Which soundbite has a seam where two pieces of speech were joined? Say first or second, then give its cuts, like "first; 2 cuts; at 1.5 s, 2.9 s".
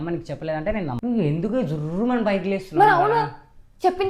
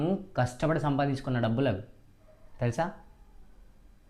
first; 1 cut; at 1.0 s